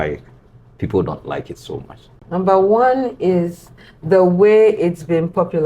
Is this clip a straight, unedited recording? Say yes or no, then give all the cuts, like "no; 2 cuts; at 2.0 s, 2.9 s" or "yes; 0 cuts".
no; 1 cut; at 2.2 s